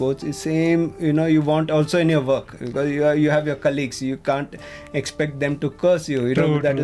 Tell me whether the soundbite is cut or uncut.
uncut